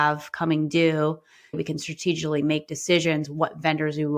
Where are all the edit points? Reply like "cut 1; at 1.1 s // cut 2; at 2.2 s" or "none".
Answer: cut 1; at 1.6 s

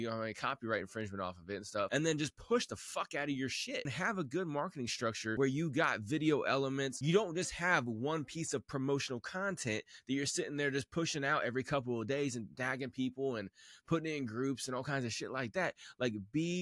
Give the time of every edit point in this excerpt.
cut 1; at 1.9 s // cut 2; at 3.9 s // cut 3; at 5.3 s // cut 4; at 7.0 s

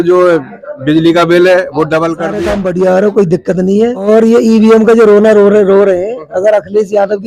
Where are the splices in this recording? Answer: cut 1; at 2.4 s // cut 2; at 4.0 s

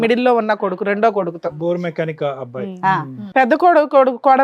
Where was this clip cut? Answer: cut 1; at 3.2 s

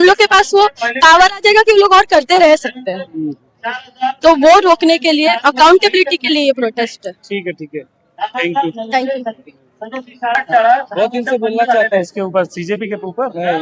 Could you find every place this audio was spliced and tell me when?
none

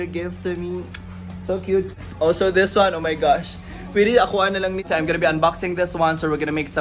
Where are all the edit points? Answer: cut 1; at 2.0 s // cut 2; at 4.8 s

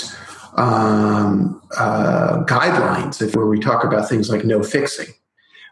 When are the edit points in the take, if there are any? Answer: cut 1; at 3.3 s

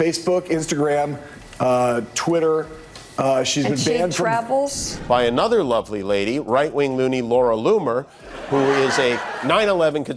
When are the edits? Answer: none

